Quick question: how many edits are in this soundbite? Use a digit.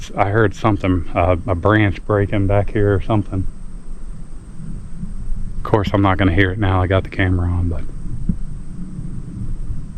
1